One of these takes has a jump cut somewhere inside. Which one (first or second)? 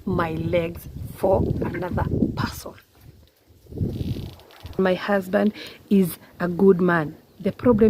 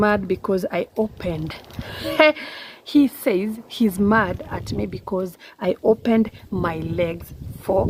first